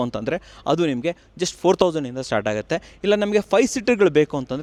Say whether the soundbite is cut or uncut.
uncut